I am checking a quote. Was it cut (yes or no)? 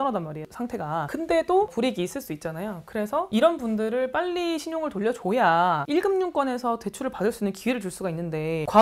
no